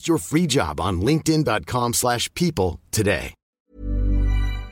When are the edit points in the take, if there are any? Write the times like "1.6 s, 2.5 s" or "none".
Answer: 3.6 s